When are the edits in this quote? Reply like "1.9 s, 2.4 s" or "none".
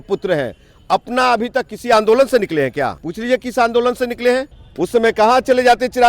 3.1 s, 4.6 s